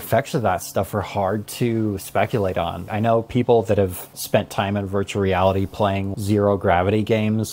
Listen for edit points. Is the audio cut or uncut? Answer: cut